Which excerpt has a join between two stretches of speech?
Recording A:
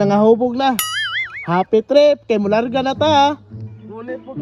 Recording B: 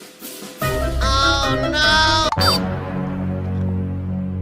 B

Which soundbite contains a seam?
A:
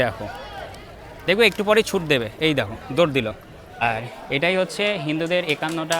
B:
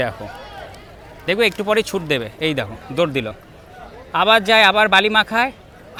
A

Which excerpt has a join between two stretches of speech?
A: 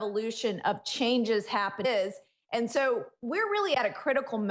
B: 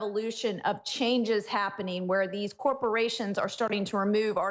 B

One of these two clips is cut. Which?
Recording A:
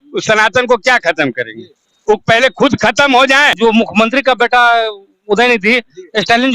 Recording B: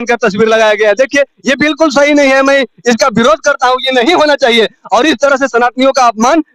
A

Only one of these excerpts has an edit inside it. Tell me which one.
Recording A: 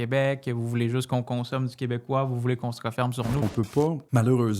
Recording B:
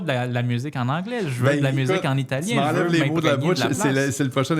A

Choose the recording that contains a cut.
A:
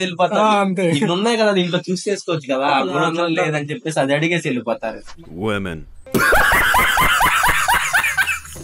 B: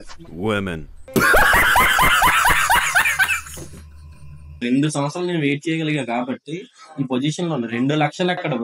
B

